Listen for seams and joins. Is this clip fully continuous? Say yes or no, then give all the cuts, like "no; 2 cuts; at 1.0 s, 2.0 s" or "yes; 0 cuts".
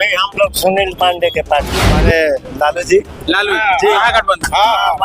no; 1 cut; at 2.0 s